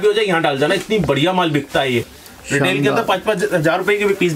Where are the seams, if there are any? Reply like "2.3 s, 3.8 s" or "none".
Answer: 2.2 s